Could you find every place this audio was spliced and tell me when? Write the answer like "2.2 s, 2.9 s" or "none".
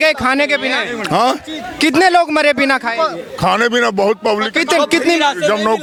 none